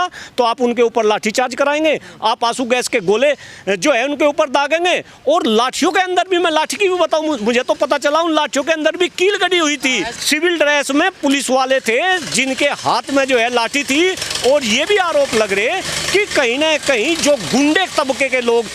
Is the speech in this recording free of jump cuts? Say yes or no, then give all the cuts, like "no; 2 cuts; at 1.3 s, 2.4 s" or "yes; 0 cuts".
no; 1 cut; at 10.1 s